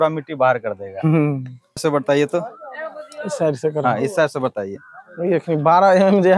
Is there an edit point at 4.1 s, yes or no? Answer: no